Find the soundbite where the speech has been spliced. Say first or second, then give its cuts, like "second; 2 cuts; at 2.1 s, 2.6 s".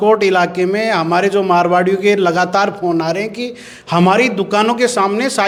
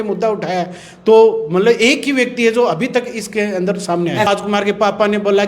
second; 1 cut; at 4.3 s